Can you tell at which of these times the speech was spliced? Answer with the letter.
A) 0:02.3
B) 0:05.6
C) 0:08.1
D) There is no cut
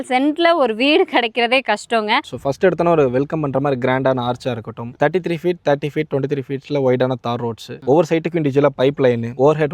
A